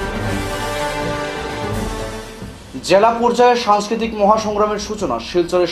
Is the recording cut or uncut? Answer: uncut